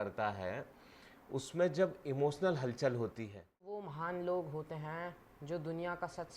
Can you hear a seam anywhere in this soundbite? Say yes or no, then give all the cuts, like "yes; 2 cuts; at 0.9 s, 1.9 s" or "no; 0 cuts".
yes; 1 cut; at 3.9 s